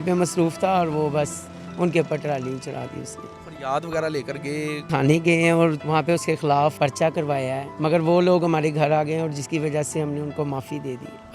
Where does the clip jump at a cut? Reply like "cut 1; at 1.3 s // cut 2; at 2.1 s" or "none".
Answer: cut 1; at 3.4 s // cut 2; at 4.8 s // cut 3; at 5.8 s // cut 4; at 6.7 s // cut 5; at 7.7 s